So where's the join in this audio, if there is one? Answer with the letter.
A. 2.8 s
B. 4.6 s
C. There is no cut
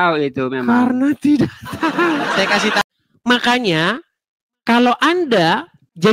A